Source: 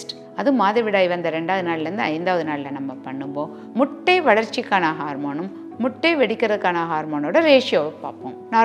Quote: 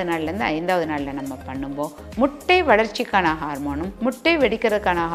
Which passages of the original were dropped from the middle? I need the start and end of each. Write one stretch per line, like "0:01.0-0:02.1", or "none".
0:05.5-0:05.7